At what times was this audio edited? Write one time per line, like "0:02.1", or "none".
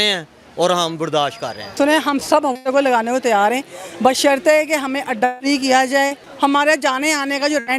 0:01.7
0:06.2